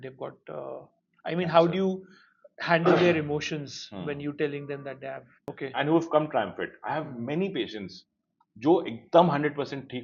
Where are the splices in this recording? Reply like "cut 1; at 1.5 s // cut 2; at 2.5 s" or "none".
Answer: cut 1; at 5.4 s